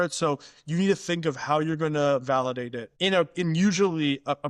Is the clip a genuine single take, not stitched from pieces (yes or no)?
no